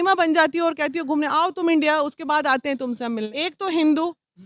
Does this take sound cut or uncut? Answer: cut